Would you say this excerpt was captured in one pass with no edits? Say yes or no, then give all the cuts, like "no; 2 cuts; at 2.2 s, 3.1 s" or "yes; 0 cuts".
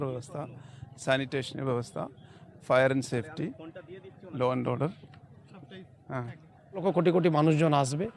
no; 1 cut; at 6.8 s